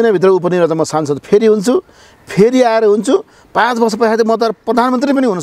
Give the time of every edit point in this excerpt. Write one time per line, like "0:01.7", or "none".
none